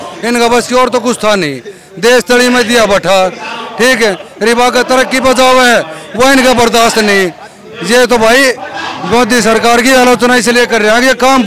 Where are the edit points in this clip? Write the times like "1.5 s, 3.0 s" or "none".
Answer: none